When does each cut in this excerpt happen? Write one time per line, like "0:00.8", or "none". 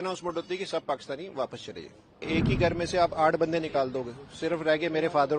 0:02.2